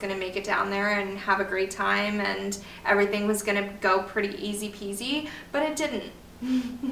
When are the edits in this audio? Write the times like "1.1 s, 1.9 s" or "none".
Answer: none